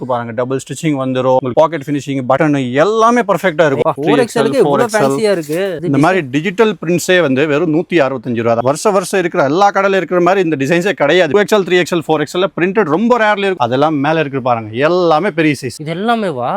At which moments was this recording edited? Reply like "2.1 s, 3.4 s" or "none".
3.8 s, 5.8 s, 8.6 s, 11.3 s, 13.6 s